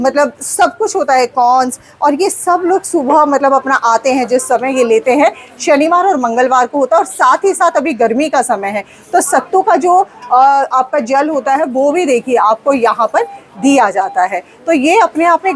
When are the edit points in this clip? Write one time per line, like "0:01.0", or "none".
none